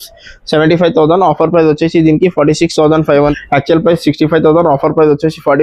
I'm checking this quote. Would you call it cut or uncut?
cut